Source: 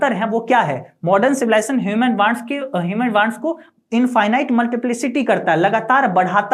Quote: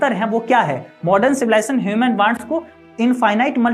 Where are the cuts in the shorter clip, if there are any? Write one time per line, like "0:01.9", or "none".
0:02.4